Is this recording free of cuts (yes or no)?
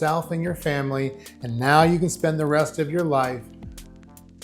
yes